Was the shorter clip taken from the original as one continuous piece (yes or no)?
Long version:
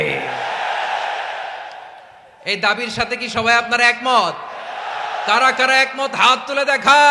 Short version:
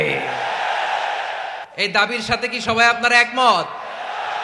no